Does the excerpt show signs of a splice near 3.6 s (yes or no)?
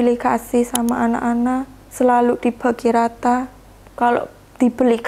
no